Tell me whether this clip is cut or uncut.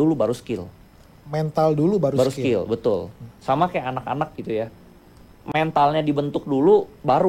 uncut